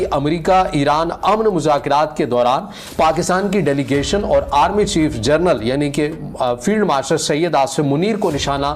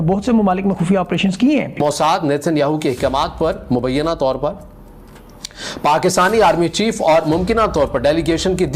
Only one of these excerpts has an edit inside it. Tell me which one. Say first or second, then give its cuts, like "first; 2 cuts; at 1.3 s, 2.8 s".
second; 1 cut; at 1.8 s